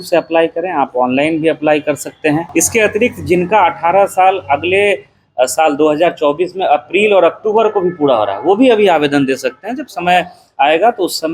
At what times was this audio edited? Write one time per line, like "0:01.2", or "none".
0:02.5